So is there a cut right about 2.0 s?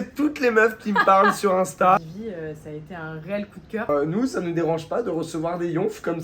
yes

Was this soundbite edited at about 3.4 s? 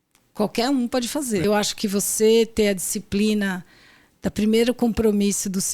no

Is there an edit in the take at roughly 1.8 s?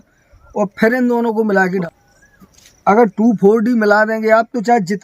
yes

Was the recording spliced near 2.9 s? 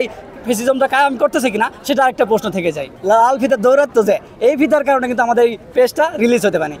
yes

